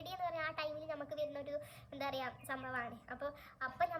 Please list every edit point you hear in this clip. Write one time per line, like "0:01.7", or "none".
none